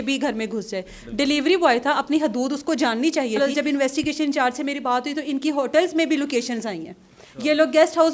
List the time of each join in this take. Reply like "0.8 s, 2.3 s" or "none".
3.4 s